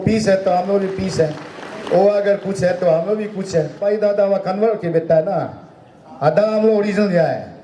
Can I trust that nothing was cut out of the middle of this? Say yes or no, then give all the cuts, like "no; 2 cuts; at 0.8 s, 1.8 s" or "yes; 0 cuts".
no; 1 cut; at 3.8 s